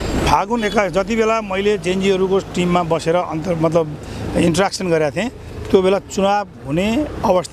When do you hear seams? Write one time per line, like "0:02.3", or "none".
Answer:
none